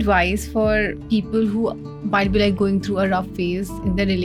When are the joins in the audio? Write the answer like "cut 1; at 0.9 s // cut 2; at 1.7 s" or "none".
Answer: none